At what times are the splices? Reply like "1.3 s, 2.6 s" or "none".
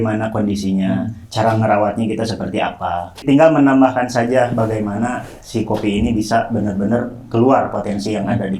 3.2 s

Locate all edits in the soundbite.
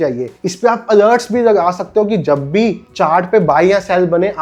none

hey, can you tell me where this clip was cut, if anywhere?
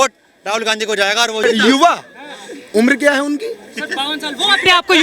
1.4 s

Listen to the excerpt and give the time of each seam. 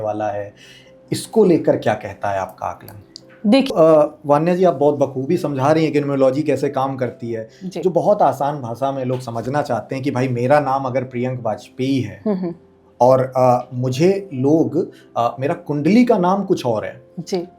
none

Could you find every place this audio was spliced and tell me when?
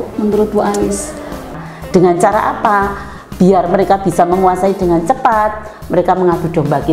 1.5 s

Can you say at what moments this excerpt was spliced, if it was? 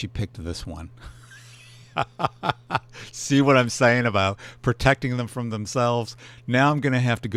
none

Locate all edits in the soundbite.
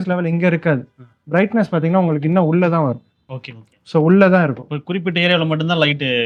none

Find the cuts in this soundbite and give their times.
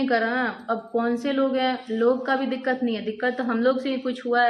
none

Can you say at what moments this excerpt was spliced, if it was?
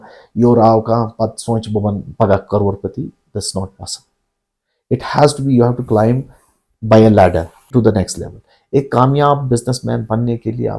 7.7 s

